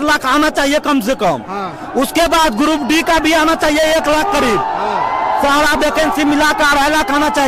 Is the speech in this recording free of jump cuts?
yes; 0 cuts

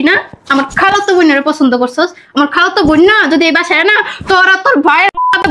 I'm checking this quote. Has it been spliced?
no; 0 cuts

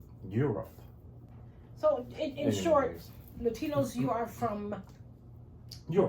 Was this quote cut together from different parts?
yes; 1 cut; at 1.6 s

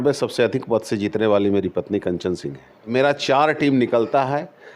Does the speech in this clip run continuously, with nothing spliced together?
no; 1 cut; at 2.9 s

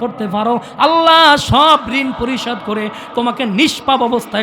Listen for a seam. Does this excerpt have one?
no; 0 cuts

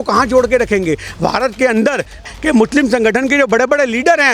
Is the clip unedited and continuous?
no; 1 cut; at 2.2 s

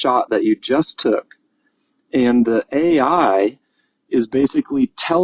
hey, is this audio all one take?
yes; 0 cuts

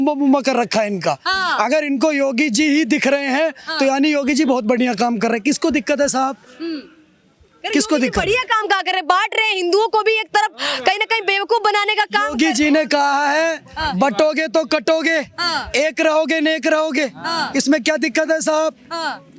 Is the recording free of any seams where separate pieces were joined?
yes; 0 cuts

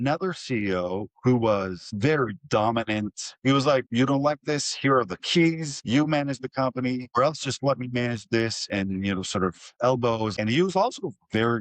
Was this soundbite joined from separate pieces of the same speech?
yes; 5 cuts; at 3.9 s, 5.7 s, 7.1 s, 8.7 s, 10.3 s

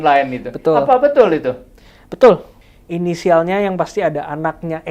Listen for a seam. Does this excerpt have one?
yes; 1 cut; at 2.6 s

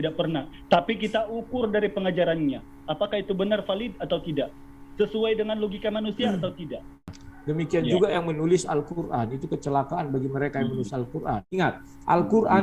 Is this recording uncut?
no; 2 cuts; at 7.2 s, 11.5 s

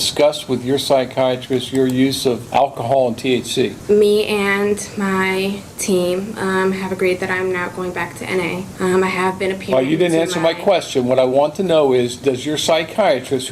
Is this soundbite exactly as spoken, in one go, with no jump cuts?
no; 3 cuts; at 2.4 s, 3.8 s, 8.7 s

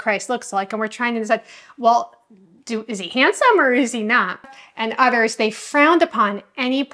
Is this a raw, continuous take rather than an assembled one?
no; 1 cut; at 4.4 s

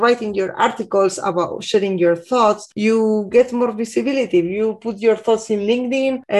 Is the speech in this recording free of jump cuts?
yes; 0 cuts

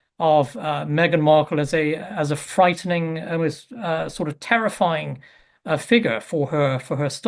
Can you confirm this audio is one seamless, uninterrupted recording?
no; 1 cut; at 6.2 s

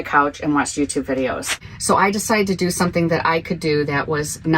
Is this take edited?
yes; 1 cut; at 1.5 s

